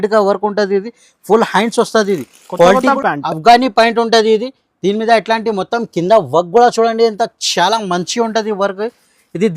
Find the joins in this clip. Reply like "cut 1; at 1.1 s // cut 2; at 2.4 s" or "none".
cut 1; at 3.0 s